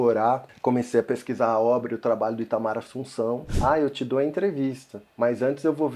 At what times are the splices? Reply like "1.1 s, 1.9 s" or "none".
3.5 s